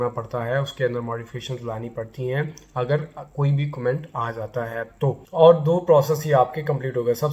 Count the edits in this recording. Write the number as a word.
one